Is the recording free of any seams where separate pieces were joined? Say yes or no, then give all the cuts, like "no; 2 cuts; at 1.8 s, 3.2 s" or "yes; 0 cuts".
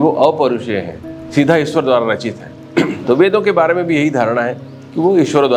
yes; 0 cuts